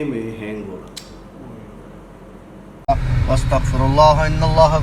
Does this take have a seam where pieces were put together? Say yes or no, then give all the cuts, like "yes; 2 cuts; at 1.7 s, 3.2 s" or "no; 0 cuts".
yes; 1 cut; at 2.7 s